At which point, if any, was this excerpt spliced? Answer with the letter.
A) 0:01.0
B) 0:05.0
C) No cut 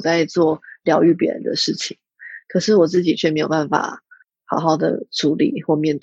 C